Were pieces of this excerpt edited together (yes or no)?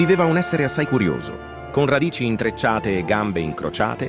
no